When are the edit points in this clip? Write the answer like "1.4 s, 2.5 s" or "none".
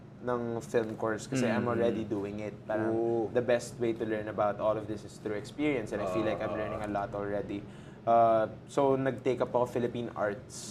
none